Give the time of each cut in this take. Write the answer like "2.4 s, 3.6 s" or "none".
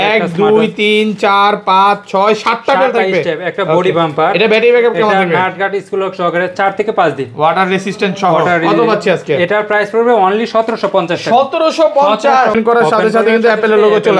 12.6 s